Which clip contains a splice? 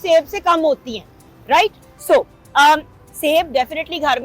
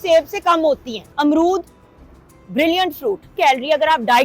second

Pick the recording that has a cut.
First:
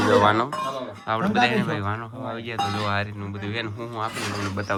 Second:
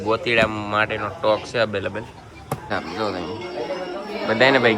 second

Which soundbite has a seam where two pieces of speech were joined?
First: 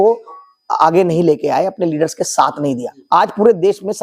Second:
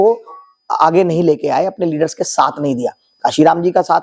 first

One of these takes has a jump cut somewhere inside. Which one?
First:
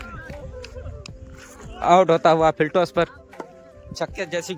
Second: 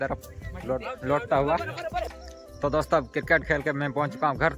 second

